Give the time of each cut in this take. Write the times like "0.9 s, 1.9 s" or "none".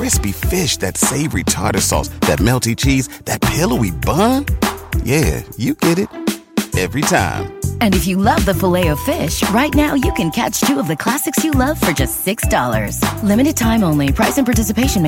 none